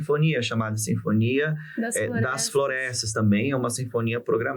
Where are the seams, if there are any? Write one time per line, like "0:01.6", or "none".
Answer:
none